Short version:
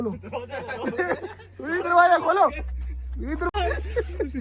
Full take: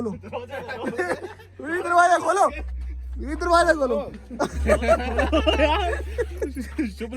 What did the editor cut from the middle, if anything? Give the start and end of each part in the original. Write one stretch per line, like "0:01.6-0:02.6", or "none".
0:03.5-0:05.7